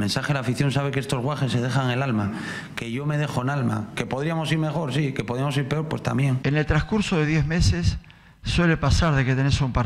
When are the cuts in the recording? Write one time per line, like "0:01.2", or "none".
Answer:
0:06.4